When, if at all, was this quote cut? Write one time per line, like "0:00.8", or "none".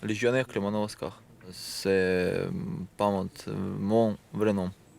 0:01.7